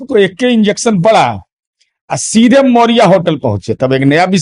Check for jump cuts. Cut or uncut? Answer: uncut